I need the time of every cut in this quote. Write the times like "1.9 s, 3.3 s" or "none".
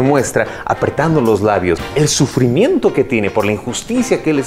1.8 s